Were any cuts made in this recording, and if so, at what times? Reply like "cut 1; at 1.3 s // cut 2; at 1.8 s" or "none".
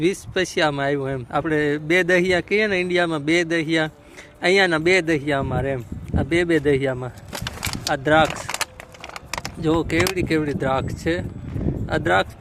none